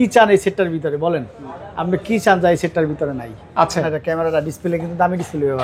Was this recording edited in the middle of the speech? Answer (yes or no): yes